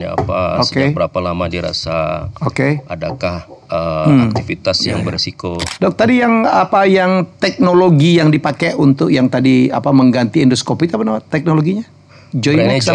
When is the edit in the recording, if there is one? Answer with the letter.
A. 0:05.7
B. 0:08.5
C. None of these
A